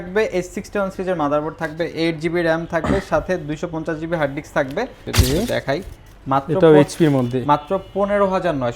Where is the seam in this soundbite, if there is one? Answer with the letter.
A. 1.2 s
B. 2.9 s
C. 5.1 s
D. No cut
C